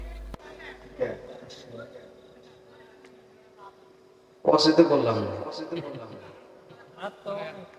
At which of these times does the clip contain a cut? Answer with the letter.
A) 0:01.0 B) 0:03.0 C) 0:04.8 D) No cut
D